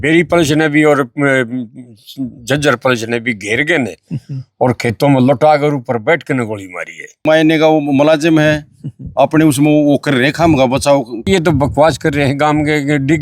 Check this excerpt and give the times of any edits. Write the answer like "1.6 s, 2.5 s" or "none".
7.2 s, 11.2 s